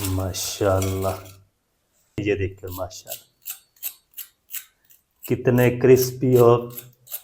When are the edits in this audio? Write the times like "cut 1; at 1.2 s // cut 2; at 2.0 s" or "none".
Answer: cut 1; at 2.2 s